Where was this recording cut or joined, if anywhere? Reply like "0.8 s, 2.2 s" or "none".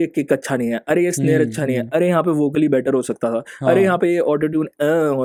none

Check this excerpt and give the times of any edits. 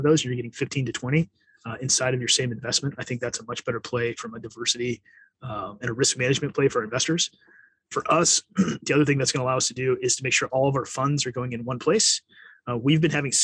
none

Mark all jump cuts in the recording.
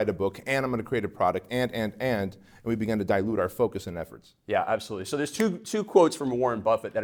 none

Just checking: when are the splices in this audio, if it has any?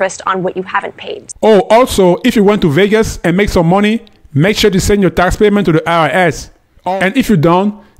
1.2 s

